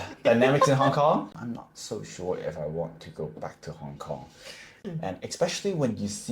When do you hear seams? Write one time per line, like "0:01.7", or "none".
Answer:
0:01.3
0:04.7